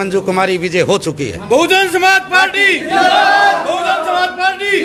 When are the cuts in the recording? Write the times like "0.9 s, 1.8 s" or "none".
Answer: none